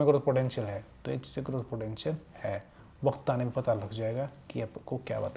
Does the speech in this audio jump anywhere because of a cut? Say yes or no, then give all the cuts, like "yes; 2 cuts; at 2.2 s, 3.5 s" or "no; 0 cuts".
no; 0 cuts